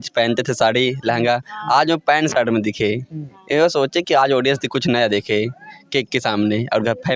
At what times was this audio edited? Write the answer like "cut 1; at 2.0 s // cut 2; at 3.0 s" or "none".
none

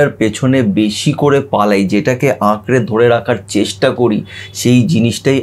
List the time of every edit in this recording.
none

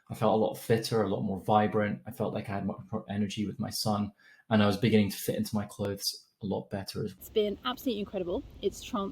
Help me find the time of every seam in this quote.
cut 1; at 7.2 s

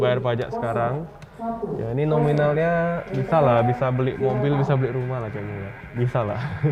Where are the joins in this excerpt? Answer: none

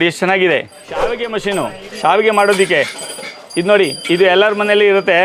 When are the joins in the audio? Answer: cut 1; at 1.0 s

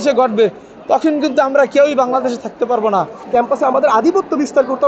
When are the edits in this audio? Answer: cut 1; at 3.2 s

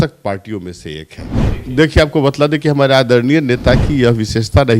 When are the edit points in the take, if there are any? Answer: cut 1; at 1.4 s

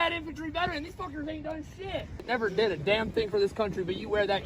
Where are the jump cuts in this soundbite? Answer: cut 1; at 2.2 s

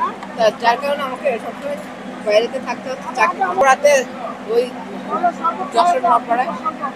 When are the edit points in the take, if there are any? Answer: cut 1; at 3.6 s

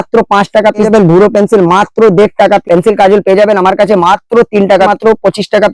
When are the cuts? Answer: cut 1; at 0.9 s // cut 2; at 2.6 s // cut 3; at 4.9 s

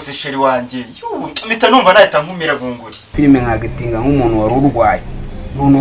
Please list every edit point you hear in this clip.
cut 1; at 3.1 s

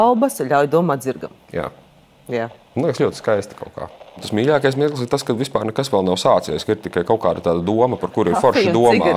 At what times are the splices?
cut 1; at 4.2 s

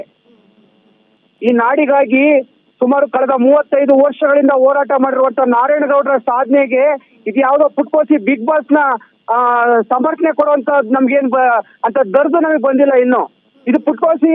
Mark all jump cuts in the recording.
cut 1; at 1.2 s

